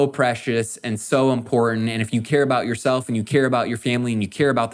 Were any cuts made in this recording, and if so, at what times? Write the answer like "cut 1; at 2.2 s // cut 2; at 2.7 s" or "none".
none